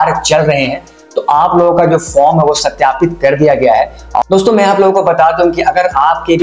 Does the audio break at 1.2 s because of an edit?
no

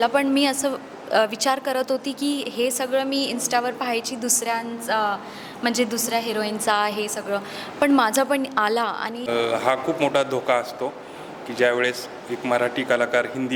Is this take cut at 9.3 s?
yes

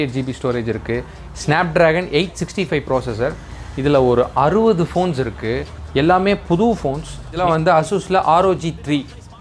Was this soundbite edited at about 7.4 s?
yes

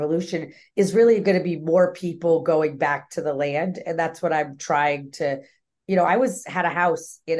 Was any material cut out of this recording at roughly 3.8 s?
no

